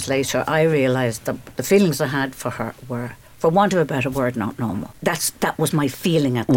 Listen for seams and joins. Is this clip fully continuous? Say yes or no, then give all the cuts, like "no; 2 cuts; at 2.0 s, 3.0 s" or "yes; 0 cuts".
no; 2 cuts; at 3.2 s, 4.9 s